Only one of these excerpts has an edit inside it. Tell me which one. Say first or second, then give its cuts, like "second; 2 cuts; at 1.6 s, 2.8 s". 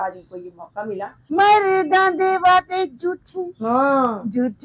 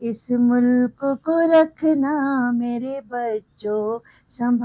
first; 1 cut; at 1.2 s